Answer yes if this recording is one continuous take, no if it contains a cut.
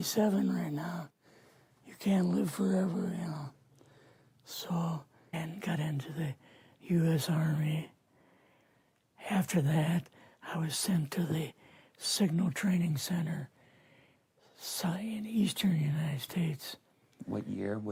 yes